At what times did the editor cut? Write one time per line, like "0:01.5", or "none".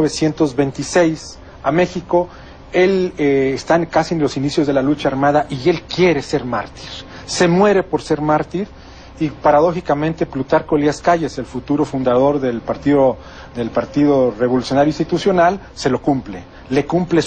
0:05.8

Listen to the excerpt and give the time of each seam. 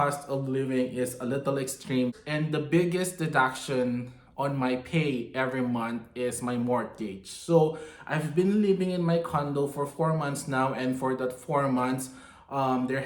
none

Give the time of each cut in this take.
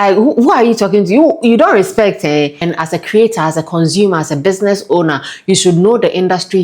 0:02.6

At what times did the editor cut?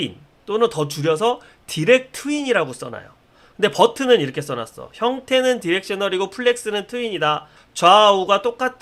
none

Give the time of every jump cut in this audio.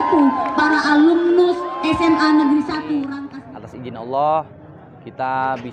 0:03.2

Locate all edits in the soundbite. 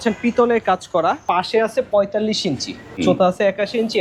0:01.2
0:03.0

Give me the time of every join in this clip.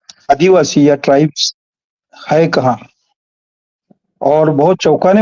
none

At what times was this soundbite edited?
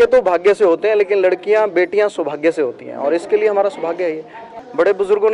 0:04.4

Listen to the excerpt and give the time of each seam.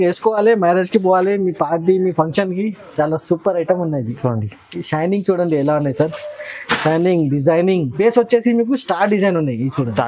0:07.9

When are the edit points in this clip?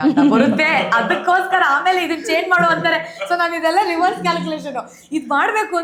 none

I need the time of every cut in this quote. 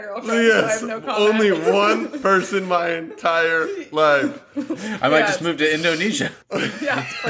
0:06.4

